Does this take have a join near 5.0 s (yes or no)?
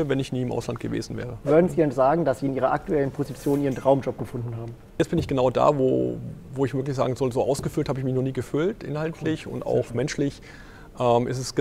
yes